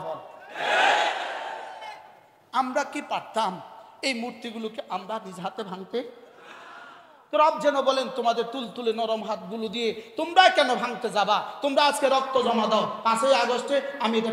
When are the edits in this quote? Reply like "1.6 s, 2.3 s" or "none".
none

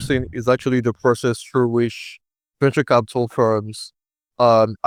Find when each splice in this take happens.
none

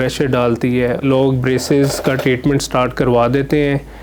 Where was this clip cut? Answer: 1.0 s

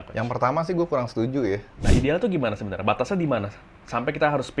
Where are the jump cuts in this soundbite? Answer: 1.8 s

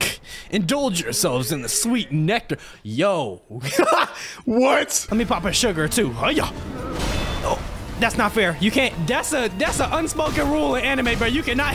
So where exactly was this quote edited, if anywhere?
5.0 s, 8.9 s

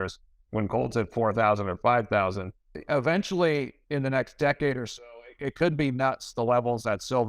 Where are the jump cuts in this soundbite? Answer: 2.7 s

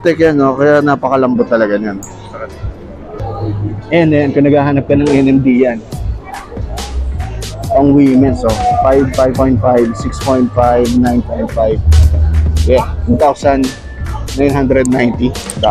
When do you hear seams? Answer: none

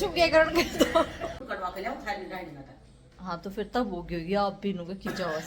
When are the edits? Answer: 1.4 s

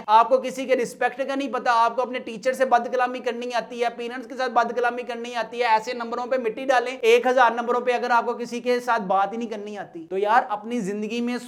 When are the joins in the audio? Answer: none

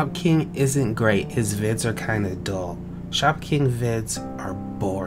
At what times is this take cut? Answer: none

